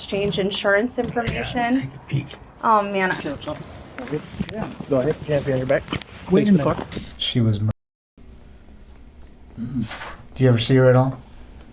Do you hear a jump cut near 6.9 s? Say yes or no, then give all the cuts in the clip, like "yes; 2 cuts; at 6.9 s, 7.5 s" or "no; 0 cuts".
yes; 2 cuts; at 3.2 s, 6.9 s